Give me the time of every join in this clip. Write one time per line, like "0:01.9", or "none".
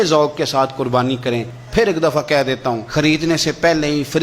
0:01.6
0:02.8